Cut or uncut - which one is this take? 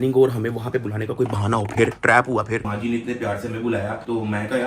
cut